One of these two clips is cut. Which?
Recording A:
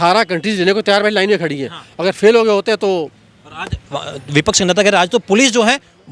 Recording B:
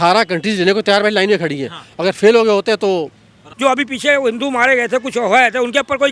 B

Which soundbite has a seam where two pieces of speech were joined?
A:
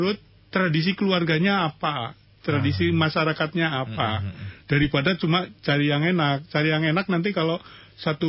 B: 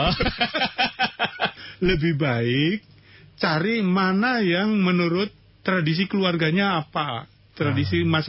B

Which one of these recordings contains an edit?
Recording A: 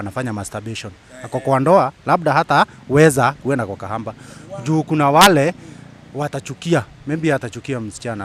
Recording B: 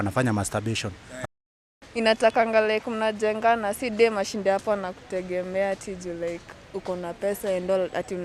B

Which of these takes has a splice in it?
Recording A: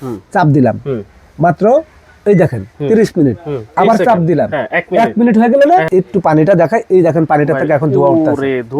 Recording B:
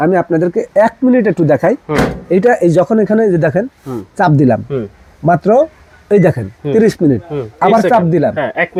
A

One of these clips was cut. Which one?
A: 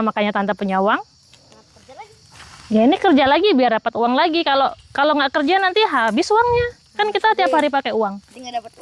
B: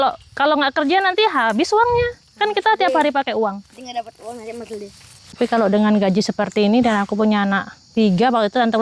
B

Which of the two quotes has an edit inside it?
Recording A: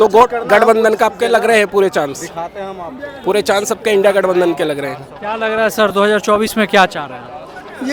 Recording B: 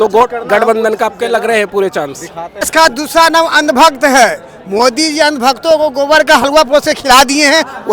B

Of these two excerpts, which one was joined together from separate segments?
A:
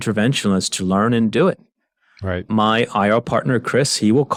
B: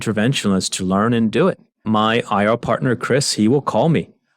B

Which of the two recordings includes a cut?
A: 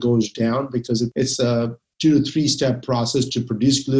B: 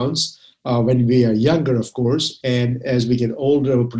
A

